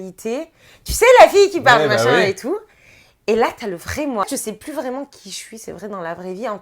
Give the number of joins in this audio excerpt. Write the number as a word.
one